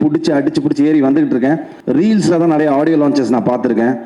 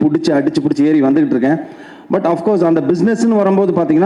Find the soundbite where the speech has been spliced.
first; 1 cut; at 1.7 s

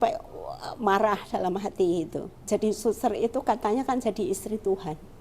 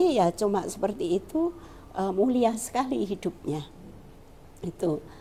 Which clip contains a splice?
first; 1 cut; at 2.5 s

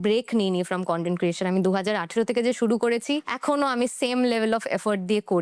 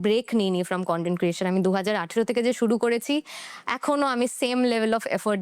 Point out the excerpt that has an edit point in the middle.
first; 1 cut; at 3.3 s

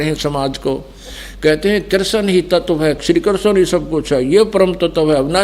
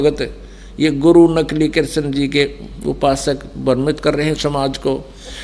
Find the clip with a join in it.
first; 1 cut; at 3.0 s

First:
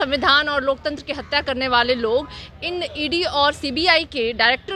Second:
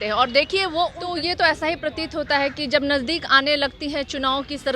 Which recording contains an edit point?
second; 1 cut; at 1.0 s

